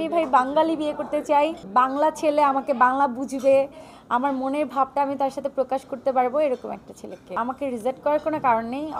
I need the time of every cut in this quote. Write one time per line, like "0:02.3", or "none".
0:01.6
0:07.3